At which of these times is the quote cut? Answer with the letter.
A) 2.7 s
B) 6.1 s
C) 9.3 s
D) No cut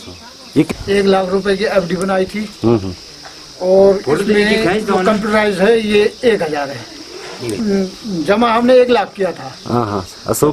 D